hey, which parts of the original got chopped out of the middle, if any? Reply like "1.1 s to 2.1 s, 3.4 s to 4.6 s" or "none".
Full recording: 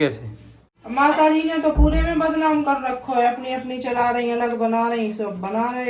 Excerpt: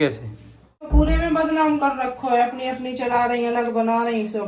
0.9 s to 1.8 s